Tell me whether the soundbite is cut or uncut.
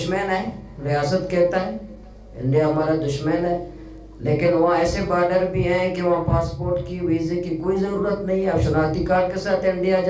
uncut